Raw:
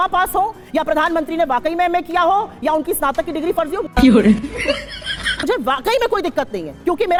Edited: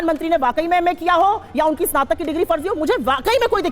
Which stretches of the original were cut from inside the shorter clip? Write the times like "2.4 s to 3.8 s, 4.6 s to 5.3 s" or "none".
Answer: 3.8 s to 5.3 s